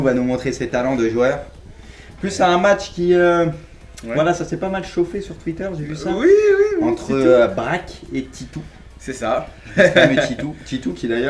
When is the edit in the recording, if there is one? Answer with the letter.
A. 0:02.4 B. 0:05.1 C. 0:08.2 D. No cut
D